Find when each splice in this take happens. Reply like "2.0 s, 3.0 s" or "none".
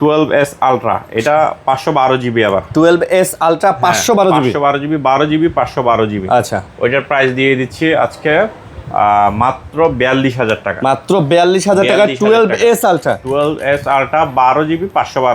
none